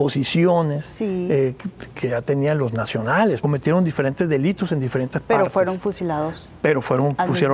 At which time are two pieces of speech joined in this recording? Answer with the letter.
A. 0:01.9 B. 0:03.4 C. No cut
B